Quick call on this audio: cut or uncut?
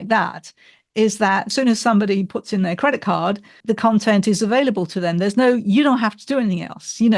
cut